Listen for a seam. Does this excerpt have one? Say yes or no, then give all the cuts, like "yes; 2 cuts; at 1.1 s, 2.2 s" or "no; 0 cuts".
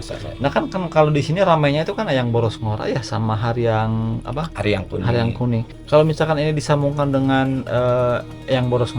yes; 1 cut; at 5.7 s